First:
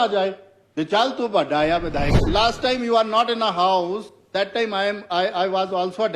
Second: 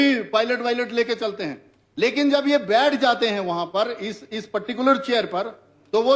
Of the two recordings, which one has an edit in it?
first; 1 cut; at 2.2 s

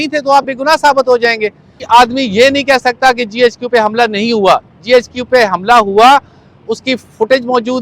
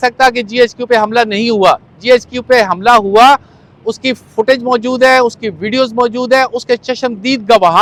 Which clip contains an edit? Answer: first; 1 cut; at 1.8 s

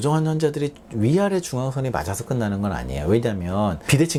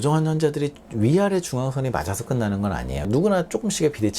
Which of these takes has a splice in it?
second; 1 cut; at 3.0 s

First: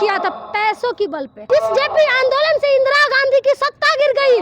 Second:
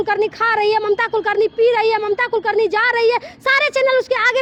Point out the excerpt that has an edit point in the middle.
first; 1 cut; at 1.4 s

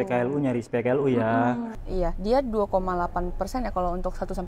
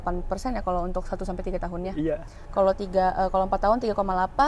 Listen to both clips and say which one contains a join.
first; 1 cut; at 1.7 s

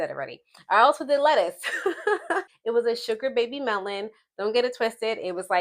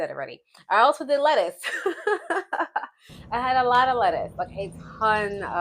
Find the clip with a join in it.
first; 1 cut; at 2.5 s

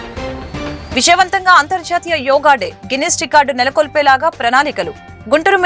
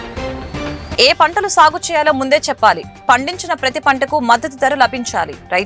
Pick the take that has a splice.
first; 1 cut; at 0.9 s

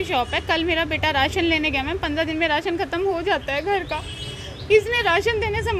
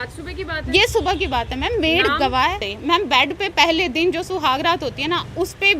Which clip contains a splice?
second; 1 cut; at 2.7 s

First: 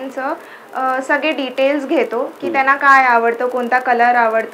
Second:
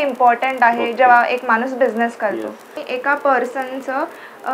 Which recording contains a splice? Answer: second; 1 cut; at 2.8 s

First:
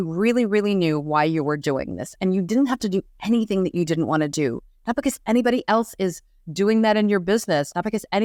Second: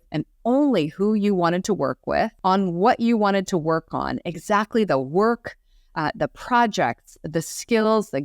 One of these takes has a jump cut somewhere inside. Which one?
second; 1 cut; at 2.3 s

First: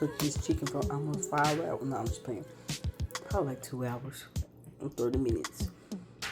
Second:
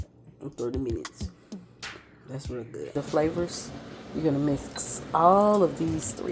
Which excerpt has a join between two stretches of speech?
second; 1 cut; at 2.9 s

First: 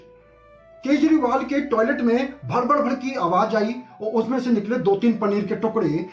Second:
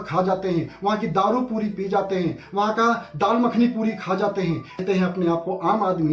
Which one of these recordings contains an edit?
second; 1 cut; at 4.8 s

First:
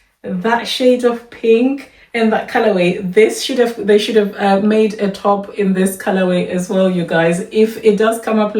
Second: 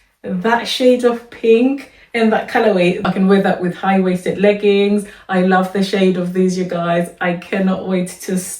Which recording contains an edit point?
second; 1 cut; at 3.1 s

